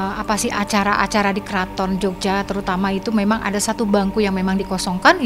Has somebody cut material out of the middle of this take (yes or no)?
no